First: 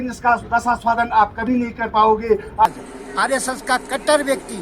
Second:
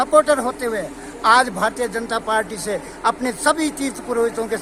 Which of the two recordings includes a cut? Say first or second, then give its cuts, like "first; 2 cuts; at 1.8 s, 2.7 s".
first; 1 cut; at 2.6 s